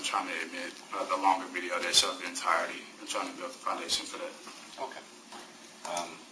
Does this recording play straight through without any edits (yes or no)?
yes